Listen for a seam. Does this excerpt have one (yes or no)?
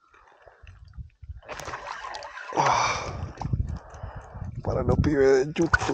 no